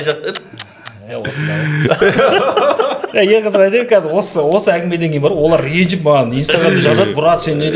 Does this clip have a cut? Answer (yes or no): no